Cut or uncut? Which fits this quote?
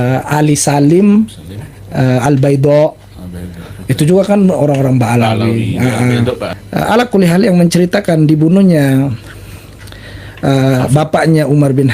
cut